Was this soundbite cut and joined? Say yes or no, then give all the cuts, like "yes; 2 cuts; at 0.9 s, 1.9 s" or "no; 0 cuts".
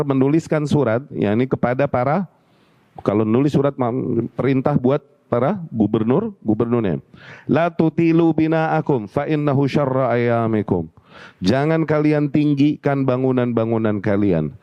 no; 0 cuts